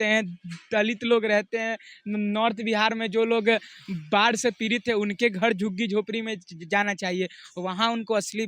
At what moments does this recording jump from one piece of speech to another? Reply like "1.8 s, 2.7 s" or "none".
none